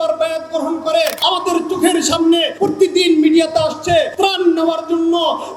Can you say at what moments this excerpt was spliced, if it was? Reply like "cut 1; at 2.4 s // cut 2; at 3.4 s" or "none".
cut 1; at 1.2 s // cut 2; at 2.5 s // cut 3; at 4.1 s

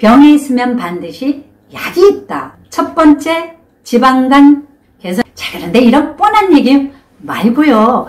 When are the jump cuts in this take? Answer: cut 1; at 2.4 s // cut 2; at 5.2 s

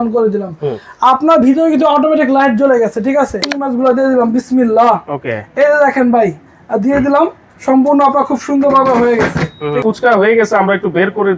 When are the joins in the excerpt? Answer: cut 1; at 3.5 s // cut 2; at 9.8 s

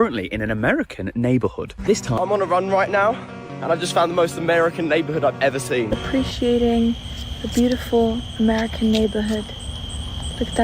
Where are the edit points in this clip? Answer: cut 1; at 2.1 s // cut 2; at 6.0 s

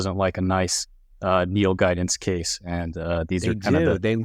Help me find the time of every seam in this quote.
none

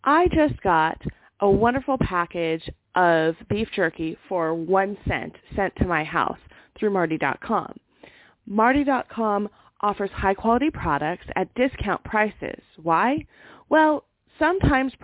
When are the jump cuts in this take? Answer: none

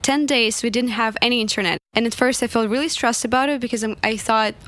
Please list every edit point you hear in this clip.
cut 1; at 1.8 s

